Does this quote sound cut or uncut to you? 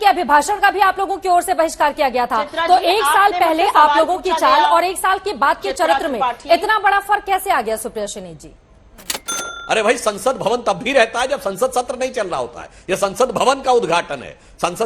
cut